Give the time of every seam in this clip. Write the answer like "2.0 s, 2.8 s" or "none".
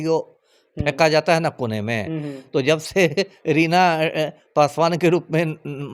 none